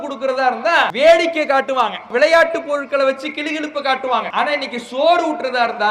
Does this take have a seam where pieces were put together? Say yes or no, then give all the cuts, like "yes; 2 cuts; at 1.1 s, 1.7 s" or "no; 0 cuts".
yes; 3 cuts; at 0.9 s, 2.1 s, 4.3 s